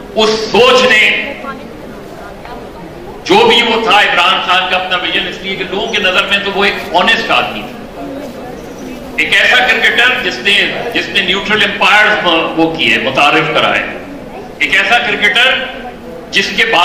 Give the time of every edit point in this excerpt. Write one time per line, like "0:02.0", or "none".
none